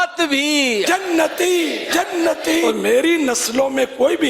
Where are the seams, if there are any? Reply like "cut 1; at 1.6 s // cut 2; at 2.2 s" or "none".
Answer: cut 1; at 2.6 s